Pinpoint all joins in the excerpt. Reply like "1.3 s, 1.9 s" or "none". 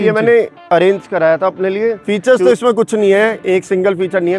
2.0 s